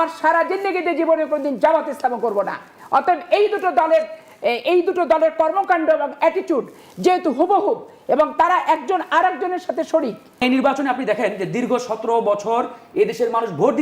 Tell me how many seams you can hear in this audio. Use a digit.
1